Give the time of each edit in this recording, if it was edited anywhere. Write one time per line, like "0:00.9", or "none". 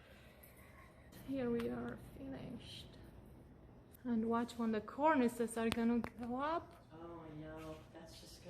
0:01.1
0:04.0